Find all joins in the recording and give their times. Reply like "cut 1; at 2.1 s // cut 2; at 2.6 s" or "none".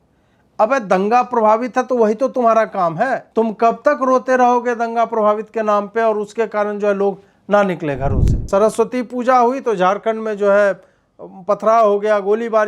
cut 1; at 3.3 s // cut 2; at 8.4 s